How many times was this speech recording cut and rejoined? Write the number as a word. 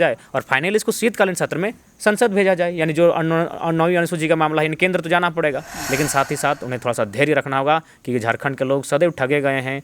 one